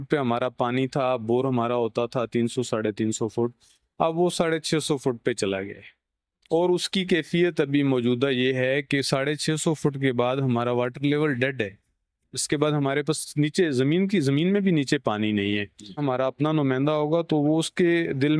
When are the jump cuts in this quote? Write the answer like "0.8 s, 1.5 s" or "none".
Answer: 15.9 s